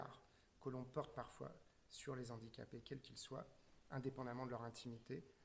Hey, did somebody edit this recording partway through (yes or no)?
no